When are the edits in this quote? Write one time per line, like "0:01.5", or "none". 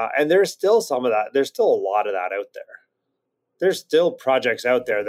0:04.2